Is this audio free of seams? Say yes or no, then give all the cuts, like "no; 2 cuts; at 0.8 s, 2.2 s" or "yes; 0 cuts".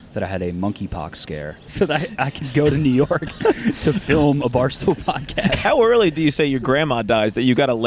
no; 2 cuts; at 1.7 s, 5.6 s